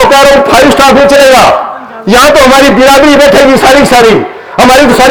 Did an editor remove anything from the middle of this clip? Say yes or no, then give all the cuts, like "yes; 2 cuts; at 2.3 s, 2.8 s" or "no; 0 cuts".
no; 0 cuts